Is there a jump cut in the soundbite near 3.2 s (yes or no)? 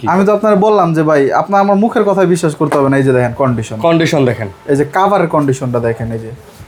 no